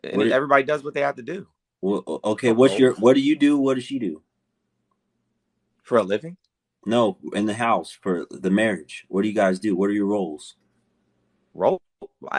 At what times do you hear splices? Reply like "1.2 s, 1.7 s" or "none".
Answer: none

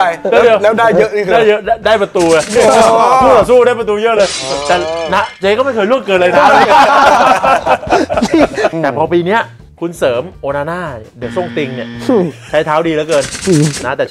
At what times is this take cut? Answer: 8.7 s

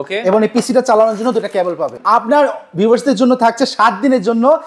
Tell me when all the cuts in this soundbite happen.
1.9 s

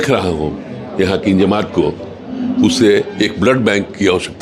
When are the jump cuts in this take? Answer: none

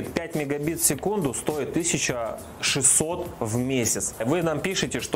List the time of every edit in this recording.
4.2 s

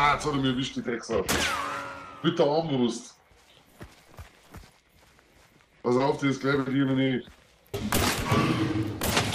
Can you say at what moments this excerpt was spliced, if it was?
7.8 s

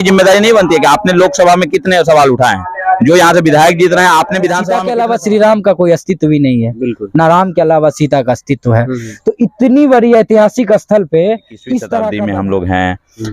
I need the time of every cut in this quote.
4.7 s, 12.1 s

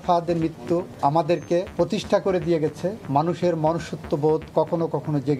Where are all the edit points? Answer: 0.9 s, 1.7 s, 3.0 s

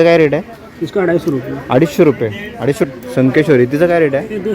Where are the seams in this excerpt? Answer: 2.9 s

